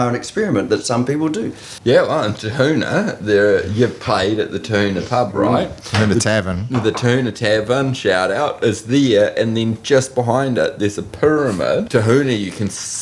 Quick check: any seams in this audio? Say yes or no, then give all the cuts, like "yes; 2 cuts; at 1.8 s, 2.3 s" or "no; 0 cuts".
yes; 2 cuts; at 1.7 s, 11.9 s